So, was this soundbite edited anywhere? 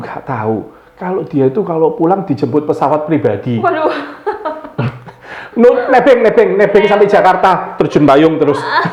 no; 0 cuts

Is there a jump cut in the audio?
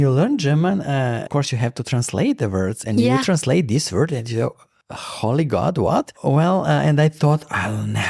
yes; 2 cuts; at 1.1 s, 6.1 s

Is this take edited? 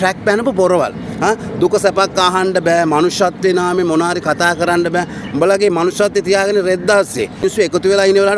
yes; 1 cut; at 7.5 s

